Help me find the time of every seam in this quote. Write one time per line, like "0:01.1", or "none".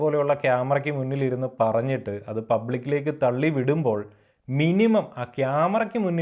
none